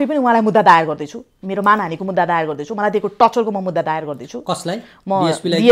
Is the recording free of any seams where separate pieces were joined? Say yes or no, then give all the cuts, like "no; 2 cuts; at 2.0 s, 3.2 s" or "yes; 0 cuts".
yes; 0 cuts